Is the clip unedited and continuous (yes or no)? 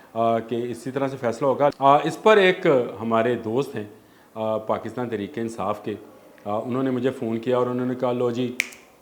no